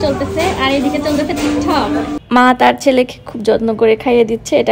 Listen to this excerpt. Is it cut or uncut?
cut